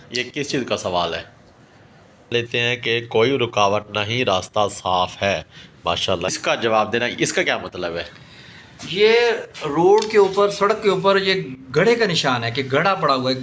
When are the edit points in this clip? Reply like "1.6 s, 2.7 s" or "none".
2.3 s, 6.3 s